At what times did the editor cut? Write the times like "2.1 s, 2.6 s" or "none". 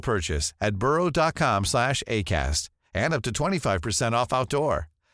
none